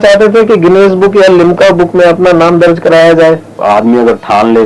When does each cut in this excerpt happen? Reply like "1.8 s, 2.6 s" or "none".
3.6 s